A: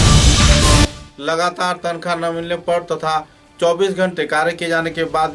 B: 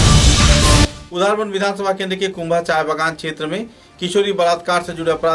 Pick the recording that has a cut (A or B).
A